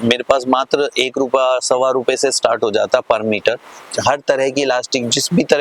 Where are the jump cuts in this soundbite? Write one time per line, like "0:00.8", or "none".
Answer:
0:03.8